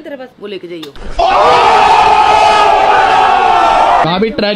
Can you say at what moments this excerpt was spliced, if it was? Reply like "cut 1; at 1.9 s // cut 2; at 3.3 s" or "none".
none

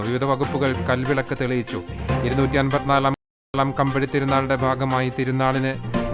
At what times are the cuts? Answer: none

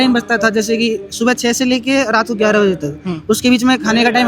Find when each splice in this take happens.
none

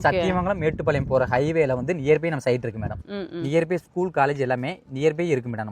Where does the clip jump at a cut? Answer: cut 1; at 3.0 s

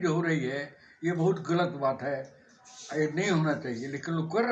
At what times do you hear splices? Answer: none

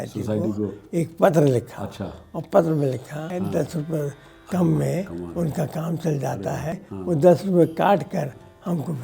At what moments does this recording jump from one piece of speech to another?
cut 1; at 3.3 s // cut 2; at 6.9 s

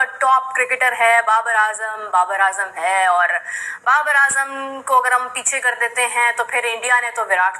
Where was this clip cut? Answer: none

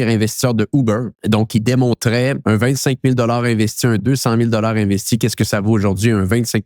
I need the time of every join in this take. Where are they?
cut 1; at 1.1 s // cut 2; at 2.4 s

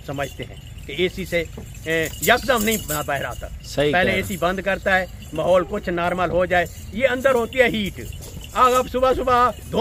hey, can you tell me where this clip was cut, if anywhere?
none

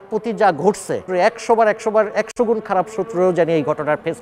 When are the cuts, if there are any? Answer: cut 1; at 1.1 s

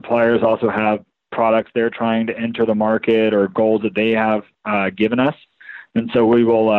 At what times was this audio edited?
none

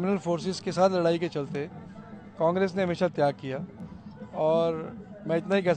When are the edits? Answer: none

